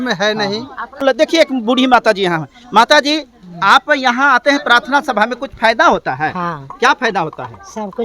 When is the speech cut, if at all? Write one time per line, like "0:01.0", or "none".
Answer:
0:01.0